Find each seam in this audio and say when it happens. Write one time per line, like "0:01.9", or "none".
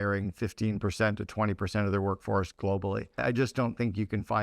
0:03.1